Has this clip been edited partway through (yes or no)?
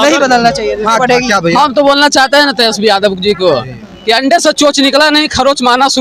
no